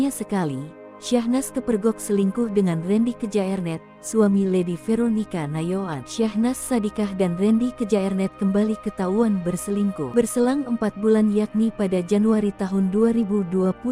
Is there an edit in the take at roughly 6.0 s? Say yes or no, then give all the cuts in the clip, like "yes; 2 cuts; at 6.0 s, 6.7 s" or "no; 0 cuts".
yes; 2 cuts; at 6.0 s, 10.0 s